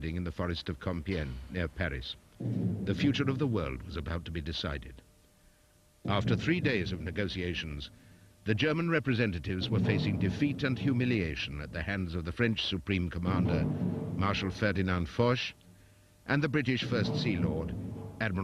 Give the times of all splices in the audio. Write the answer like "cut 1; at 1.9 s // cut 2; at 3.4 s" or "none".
none